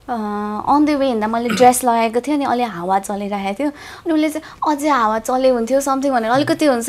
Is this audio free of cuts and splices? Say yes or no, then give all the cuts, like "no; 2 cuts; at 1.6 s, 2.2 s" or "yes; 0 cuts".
yes; 0 cuts